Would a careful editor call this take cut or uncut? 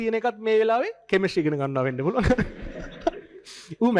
uncut